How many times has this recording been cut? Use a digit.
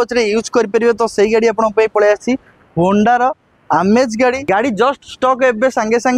1